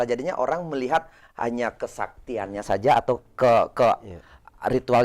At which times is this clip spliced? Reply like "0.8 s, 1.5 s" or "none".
none